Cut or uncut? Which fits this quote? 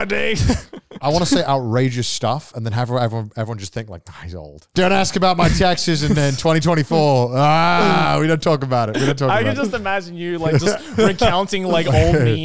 cut